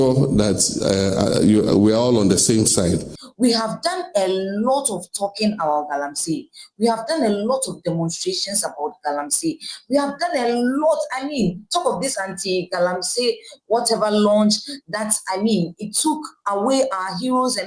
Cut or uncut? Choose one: cut